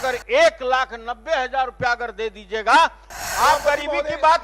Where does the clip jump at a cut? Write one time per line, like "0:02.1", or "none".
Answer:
0:03.1